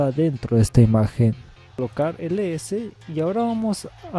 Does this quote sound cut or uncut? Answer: cut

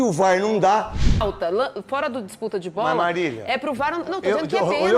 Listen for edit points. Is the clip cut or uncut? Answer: cut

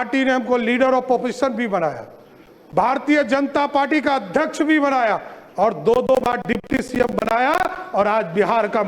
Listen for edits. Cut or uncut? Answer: uncut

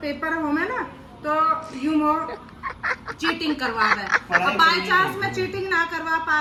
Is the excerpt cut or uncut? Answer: uncut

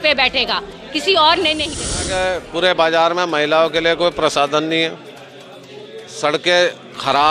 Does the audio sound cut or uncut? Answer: cut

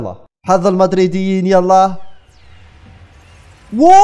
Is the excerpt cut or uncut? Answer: uncut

